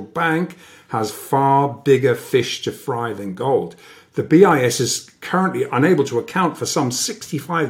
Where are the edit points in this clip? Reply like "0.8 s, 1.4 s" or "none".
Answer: none